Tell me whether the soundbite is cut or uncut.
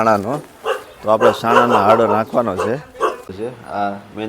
cut